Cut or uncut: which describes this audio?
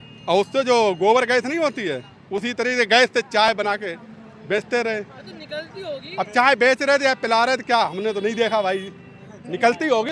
uncut